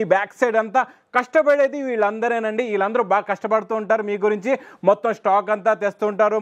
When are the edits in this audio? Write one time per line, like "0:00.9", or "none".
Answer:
none